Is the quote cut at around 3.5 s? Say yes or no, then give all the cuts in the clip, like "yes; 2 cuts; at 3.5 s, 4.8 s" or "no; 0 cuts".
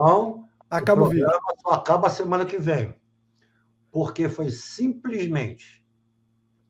no; 0 cuts